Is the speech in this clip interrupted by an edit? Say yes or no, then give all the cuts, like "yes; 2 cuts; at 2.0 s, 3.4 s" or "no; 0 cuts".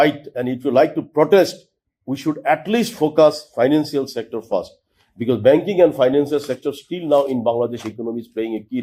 no; 0 cuts